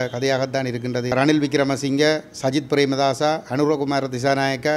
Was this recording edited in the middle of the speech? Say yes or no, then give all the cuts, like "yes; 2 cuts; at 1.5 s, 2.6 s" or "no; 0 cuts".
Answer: yes; 1 cut; at 1.1 s